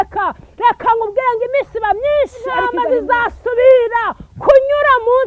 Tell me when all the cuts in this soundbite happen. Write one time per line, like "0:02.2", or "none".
0:02.7